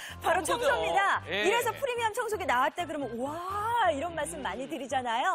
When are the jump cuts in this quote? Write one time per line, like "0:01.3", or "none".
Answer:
0:01.8
0:03.5